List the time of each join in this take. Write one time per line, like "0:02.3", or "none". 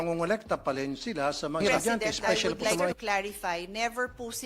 0:02.9